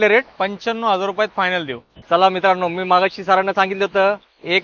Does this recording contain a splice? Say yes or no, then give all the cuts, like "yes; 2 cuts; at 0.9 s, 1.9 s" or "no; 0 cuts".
no; 0 cuts